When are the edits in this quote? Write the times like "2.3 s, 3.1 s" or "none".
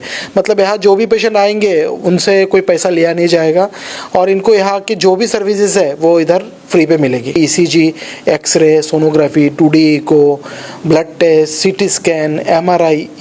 7.4 s